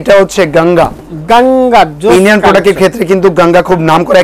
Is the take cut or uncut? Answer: uncut